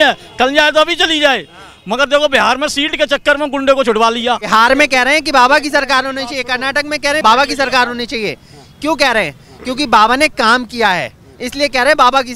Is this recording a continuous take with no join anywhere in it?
no; 2 cuts; at 4.5 s, 7.2 s

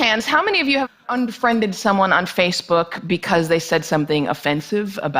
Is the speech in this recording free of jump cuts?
no; 1 cut; at 3.9 s

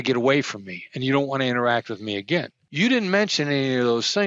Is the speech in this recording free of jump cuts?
no; 1 cut; at 2.6 s

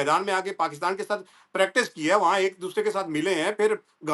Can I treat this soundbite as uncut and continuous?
yes; 0 cuts

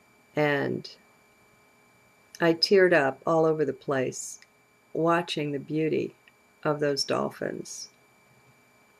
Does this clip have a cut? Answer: yes; 1 cut; at 2.6 s

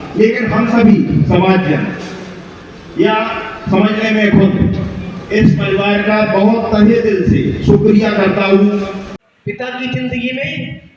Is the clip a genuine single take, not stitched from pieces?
no; 1 cut; at 9.1 s

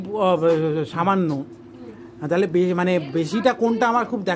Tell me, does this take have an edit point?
no; 0 cuts

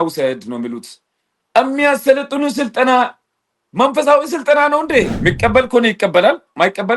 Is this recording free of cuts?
no; 1 cut; at 5.1 s

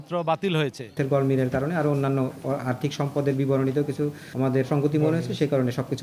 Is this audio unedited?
no; 2 cuts; at 0.9 s, 4.5 s

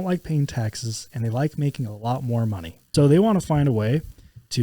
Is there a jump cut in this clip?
yes; 1 cut; at 2.8 s

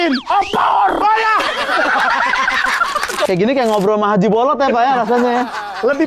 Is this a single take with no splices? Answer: no; 1 cut; at 3.3 s

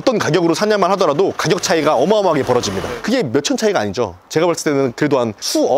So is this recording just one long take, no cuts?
yes; 0 cuts

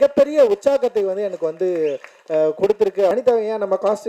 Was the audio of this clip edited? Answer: yes; 1 cut; at 3.1 s

